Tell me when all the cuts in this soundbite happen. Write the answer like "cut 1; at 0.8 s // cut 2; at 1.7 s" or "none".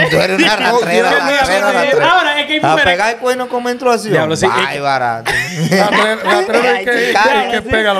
none